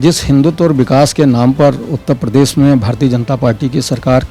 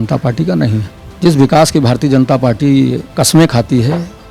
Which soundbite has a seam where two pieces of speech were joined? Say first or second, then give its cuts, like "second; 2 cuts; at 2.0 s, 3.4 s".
second; 2 cuts; at 1.0 s, 3.1 s